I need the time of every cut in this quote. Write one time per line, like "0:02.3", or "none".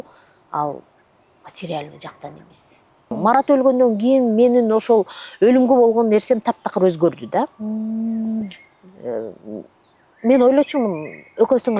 0:03.1